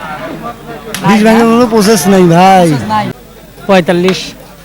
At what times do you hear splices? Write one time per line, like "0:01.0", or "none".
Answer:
0:02.9